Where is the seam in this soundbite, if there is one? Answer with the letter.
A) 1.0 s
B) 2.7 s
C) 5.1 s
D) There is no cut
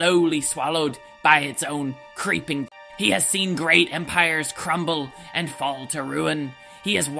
B